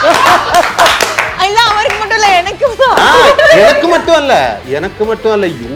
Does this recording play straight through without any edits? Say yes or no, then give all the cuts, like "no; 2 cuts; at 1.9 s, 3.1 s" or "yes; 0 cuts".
yes; 0 cuts